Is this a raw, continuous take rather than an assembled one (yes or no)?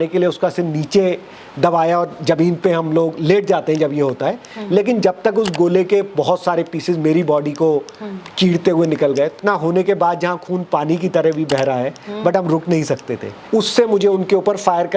no